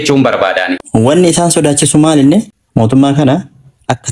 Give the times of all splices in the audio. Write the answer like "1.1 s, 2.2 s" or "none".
0.8 s, 2.6 s